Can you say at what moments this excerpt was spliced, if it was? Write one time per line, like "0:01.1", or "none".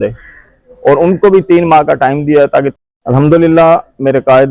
0:02.7